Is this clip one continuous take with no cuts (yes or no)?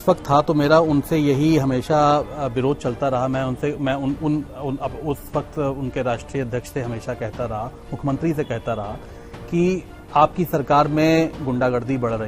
yes